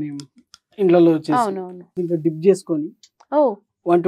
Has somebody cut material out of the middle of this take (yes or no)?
yes